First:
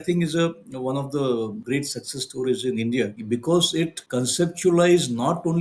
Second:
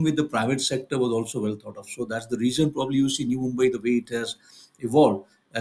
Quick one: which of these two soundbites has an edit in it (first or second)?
first